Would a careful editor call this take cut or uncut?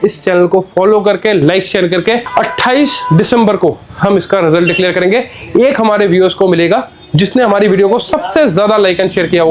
uncut